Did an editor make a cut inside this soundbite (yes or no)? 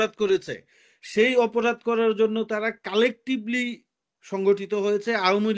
no